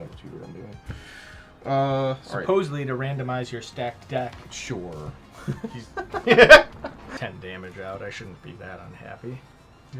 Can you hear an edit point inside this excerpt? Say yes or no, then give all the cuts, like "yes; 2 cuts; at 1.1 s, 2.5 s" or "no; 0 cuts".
yes; 1 cut; at 7.1 s